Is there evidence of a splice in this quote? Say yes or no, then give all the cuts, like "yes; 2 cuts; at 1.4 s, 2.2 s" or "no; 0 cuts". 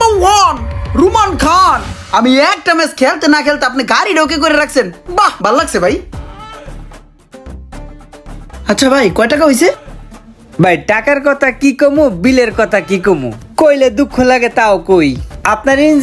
no; 0 cuts